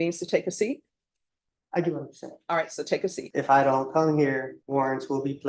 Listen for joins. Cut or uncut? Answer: cut